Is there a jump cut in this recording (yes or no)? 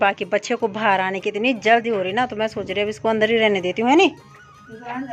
no